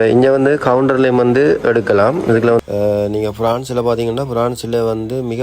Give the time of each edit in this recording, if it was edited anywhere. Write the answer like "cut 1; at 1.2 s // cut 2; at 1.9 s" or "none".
cut 1; at 2.6 s